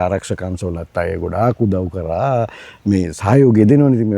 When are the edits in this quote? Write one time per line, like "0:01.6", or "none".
none